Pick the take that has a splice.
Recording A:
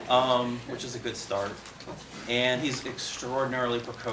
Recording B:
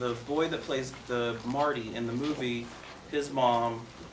B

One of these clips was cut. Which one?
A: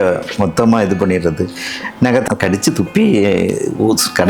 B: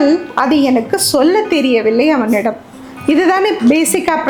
A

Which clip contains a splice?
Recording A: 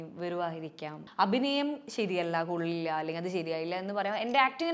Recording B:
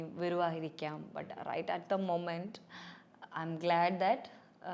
A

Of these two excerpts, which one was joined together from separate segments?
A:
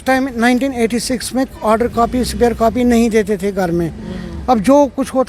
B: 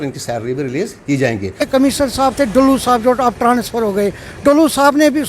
B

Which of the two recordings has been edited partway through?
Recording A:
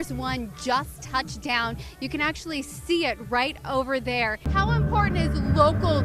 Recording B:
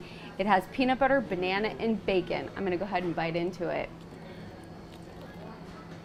A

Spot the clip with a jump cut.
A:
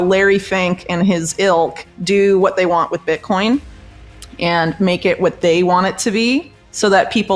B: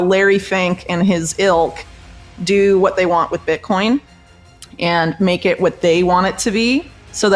A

